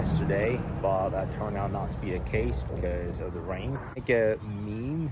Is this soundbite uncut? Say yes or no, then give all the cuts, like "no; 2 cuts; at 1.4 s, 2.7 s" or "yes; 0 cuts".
no; 1 cut; at 4.0 s